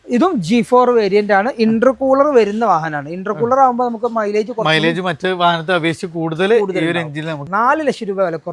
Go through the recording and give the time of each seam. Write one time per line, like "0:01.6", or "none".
0:07.3